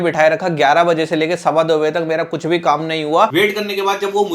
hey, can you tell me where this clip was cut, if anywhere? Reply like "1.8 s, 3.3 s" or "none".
3.3 s